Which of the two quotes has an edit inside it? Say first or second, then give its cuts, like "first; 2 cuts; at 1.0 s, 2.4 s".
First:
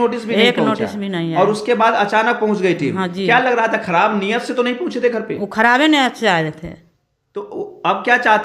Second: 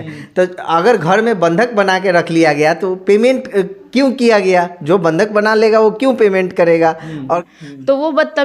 second; 1 cut; at 7.5 s